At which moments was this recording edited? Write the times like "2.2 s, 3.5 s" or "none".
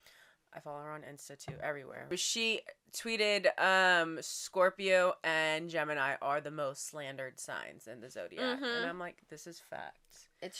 2.0 s